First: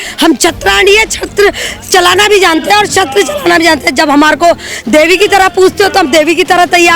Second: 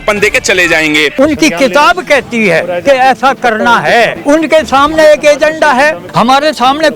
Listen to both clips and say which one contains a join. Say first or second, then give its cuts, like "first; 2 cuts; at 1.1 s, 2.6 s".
second; 3 cuts; at 1.1 s, 4.2 s, 6.0 s